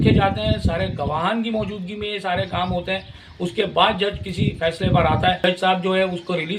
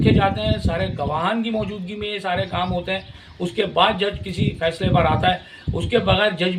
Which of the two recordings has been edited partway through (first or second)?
first